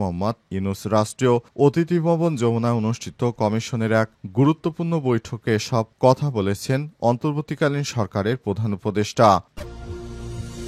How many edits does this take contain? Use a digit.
1